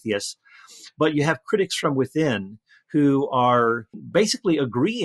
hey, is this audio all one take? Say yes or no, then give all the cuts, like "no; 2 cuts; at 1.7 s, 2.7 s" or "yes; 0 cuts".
no; 1 cut; at 4.0 s